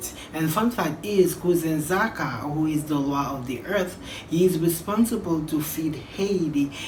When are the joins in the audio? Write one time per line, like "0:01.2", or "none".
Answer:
none